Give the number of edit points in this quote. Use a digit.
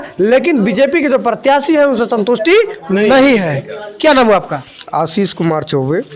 0